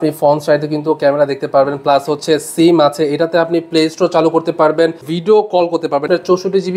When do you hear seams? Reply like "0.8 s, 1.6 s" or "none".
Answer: 5.1 s, 6.1 s